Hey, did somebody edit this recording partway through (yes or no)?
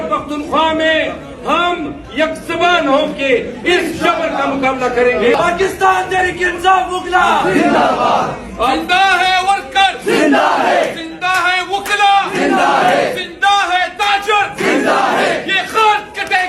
yes